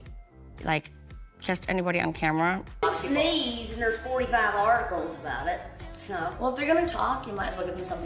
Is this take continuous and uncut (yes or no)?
no